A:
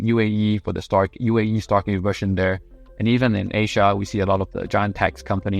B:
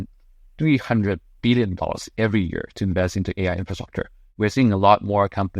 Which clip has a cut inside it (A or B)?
B